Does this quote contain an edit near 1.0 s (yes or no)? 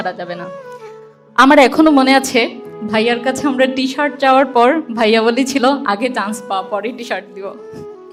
no